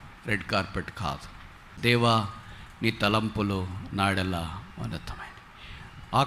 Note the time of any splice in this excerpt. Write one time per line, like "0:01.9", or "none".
0:01.7